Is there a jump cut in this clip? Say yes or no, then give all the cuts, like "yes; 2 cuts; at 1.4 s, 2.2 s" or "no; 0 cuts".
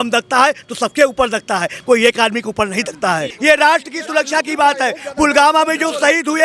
yes; 1 cut; at 3.3 s